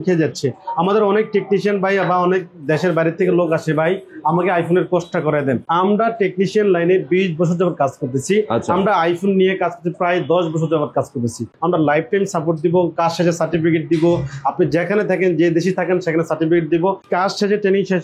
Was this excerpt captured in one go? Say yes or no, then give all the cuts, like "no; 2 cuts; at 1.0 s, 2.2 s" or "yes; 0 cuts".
no; 3 cuts; at 5.7 s, 11.5 s, 17.0 s